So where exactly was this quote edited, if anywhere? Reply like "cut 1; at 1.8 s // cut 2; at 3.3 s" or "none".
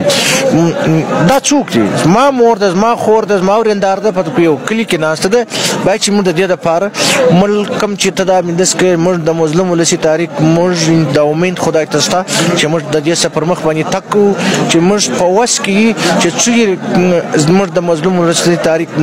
none

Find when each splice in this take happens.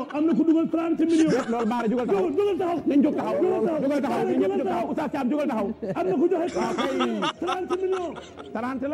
cut 1; at 7.3 s

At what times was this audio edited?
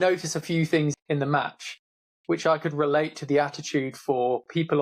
cut 1; at 0.9 s

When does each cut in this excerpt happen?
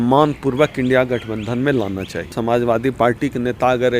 cut 1; at 2.2 s

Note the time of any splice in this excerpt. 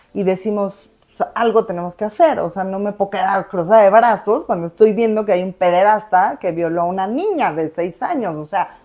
none

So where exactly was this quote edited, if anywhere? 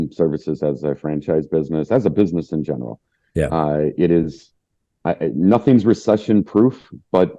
none

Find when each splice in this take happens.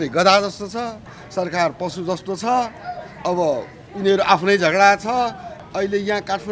cut 1; at 1.2 s // cut 2; at 5.5 s

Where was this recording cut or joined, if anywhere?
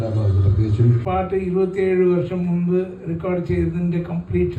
cut 1; at 1.0 s

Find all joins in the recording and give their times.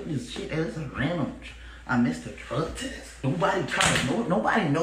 cut 1; at 3.2 s

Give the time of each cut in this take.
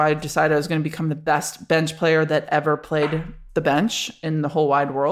none

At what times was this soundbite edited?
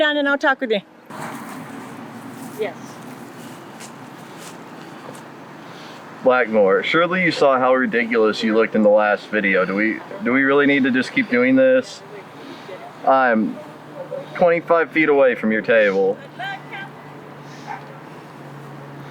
cut 1; at 1.0 s

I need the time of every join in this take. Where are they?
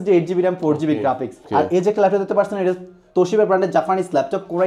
cut 1; at 1.4 s

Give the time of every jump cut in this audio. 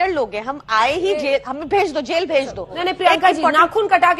cut 1; at 2.8 s

